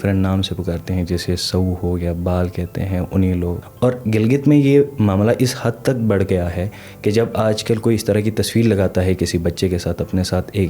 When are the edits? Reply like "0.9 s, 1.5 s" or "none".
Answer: 3.6 s